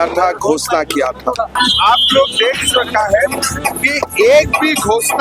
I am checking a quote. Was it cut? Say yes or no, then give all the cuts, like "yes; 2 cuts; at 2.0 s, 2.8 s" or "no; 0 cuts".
yes; 1 cut; at 1.5 s